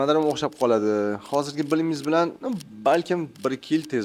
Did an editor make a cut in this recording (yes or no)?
no